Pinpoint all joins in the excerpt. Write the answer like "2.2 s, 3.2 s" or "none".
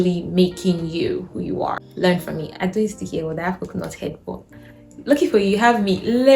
1.8 s